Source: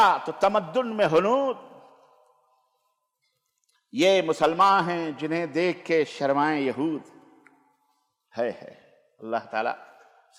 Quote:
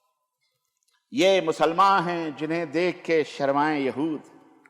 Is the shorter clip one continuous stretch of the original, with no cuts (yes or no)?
yes